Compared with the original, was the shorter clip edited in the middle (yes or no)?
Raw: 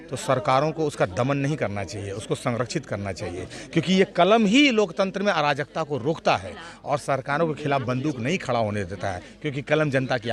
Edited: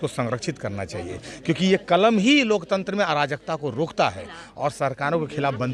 no